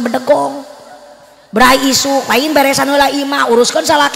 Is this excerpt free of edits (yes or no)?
yes